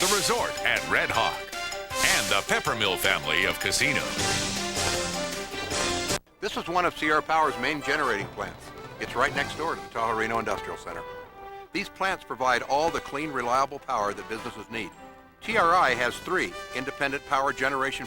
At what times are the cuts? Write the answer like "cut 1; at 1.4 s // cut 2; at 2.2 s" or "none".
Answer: cut 1; at 6.2 s